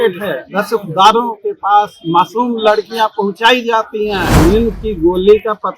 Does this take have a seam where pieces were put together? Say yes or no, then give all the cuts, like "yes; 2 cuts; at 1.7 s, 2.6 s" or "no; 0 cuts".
yes; 1 cut; at 4.3 s